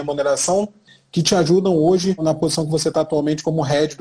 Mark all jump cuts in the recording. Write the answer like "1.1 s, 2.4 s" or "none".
0.9 s, 2.2 s